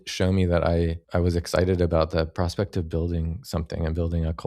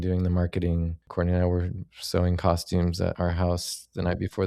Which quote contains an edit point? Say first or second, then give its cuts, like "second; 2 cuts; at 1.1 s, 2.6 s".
second; 1 cut; at 1.0 s